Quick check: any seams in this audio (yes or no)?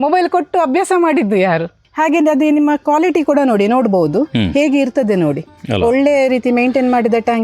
yes